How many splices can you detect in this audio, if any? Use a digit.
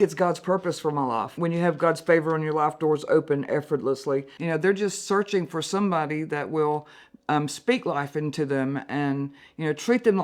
2